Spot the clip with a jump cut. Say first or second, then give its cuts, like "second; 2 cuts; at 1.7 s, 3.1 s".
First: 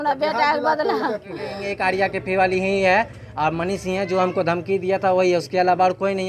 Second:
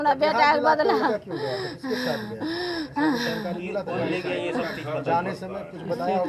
first; 1 cut; at 1.6 s